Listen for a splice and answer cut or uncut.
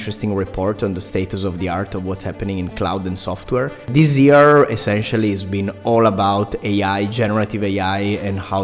cut